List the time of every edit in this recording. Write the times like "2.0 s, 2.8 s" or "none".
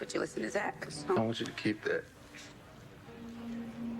1.2 s